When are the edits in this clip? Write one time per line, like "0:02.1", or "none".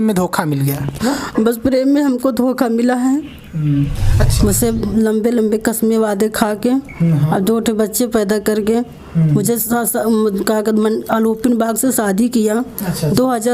0:04.3